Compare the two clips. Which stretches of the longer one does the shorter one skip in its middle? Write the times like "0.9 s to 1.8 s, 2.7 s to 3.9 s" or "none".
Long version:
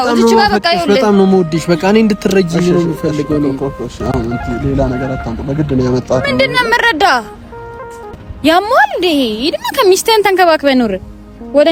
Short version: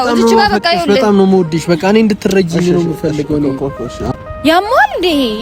4.1 s to 8.1 s